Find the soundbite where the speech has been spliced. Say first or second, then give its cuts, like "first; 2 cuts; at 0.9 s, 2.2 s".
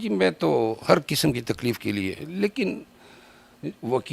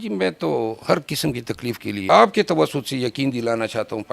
second; 1 cut; at 1.9 s